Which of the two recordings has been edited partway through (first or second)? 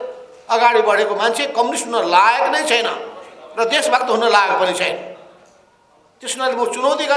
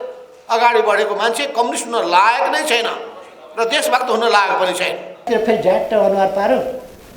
second